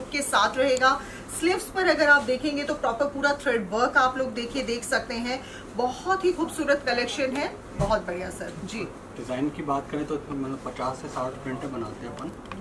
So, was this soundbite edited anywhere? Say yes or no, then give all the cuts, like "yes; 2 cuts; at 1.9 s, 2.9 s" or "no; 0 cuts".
no; 0 cuts